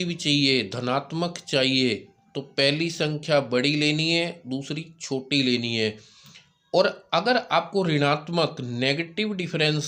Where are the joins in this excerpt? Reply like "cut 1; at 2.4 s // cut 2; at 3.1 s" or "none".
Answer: none